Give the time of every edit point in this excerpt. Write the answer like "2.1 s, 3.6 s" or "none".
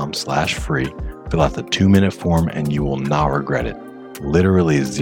none